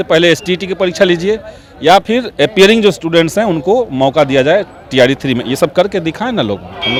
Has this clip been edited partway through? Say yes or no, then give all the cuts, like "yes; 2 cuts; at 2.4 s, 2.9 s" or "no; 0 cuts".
no; 0 cuts